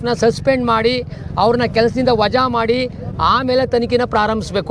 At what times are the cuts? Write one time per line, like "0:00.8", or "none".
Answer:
none

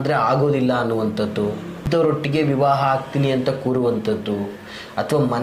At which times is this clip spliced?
0:01.8

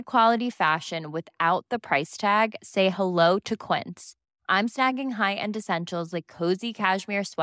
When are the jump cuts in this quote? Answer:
none

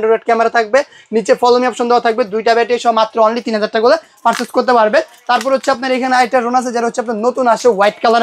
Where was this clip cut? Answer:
none

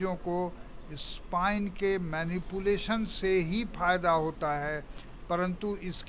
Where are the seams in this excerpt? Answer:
none

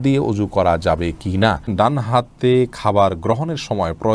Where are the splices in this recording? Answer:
0:01.7

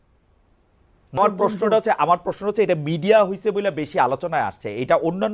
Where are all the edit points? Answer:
0:01.2

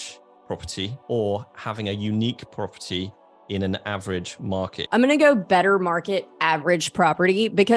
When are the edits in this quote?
0:00.9
0:04.4

